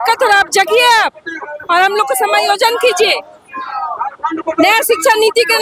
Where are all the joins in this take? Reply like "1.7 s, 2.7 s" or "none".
none